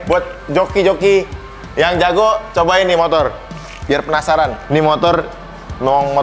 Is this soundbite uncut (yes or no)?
yes